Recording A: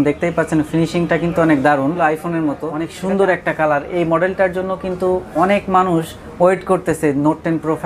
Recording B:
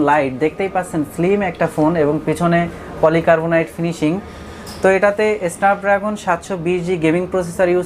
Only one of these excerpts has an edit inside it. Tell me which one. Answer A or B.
A